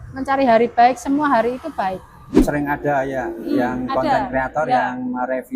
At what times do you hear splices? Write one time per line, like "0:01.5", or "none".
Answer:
0:02.4